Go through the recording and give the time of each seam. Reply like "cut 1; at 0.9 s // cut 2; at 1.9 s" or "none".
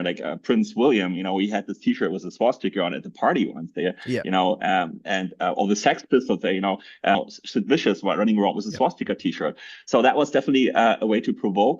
cut 1; at 7.1 s